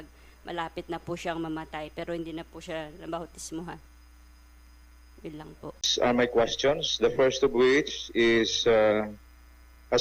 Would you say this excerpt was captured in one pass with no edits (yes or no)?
no